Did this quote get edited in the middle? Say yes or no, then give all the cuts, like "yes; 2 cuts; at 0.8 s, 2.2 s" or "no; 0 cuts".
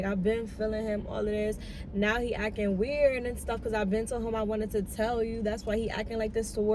no; 0 cuts